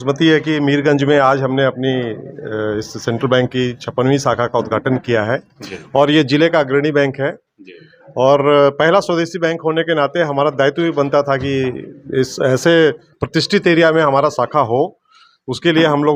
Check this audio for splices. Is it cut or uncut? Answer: uncut